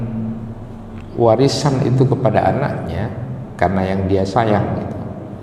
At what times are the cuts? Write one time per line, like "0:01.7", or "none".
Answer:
none